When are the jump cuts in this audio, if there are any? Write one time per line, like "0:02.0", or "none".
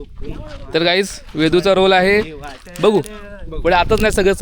none